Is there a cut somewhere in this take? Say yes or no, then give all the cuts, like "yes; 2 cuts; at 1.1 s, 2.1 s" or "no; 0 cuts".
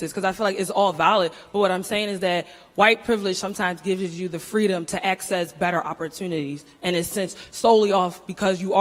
no; 0 cuts